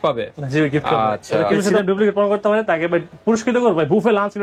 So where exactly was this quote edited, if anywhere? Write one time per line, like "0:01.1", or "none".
0:01.7